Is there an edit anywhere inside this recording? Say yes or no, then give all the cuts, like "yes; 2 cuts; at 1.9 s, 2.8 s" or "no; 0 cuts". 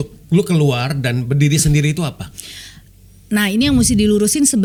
no; 0 cuts